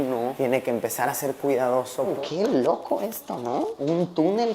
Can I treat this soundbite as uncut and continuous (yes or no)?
no